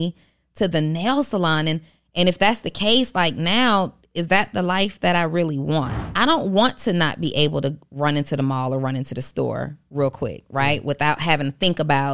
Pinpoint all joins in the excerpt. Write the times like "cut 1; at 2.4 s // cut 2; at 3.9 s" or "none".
cut 1; at 6.0 s